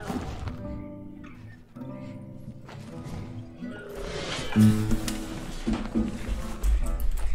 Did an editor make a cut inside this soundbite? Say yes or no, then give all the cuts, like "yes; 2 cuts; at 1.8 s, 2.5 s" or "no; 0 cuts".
no; 0 cuts